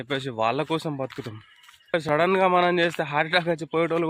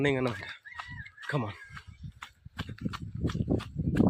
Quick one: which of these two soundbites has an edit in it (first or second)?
first